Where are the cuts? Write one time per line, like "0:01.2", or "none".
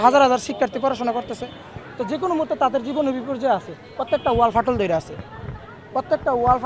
none